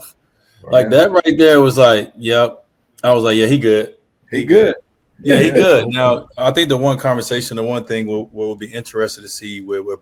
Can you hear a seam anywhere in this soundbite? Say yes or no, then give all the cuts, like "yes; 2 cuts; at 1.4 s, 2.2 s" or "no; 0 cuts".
no; 0 cuts